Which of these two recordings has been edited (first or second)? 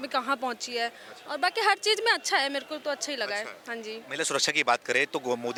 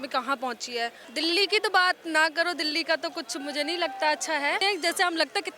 second